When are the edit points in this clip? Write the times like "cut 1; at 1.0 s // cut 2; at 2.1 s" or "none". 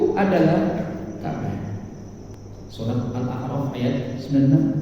cut 1; at 2.4 s